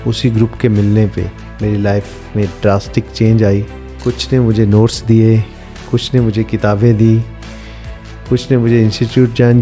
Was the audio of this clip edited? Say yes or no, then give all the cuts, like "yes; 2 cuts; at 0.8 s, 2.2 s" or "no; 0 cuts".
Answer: yes; 2 cuts; at 1.4 s, 3.8 s